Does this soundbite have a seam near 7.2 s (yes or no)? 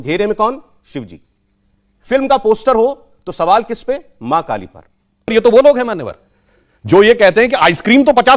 no